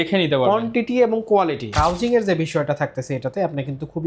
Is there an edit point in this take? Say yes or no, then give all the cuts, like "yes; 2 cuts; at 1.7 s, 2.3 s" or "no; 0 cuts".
yes; 1 cut; at 1.7 s